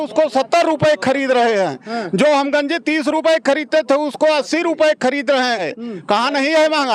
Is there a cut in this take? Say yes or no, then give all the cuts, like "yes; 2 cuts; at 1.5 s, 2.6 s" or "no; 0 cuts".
yes; 1 cut; at 5.7 s